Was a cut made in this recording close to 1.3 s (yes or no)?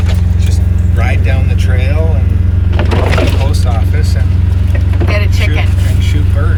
no